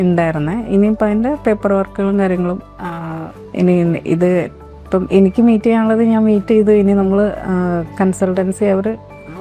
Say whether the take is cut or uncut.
uncut